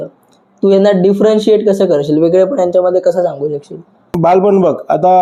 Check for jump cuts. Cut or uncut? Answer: uncut